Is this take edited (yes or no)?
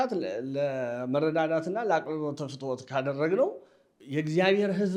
no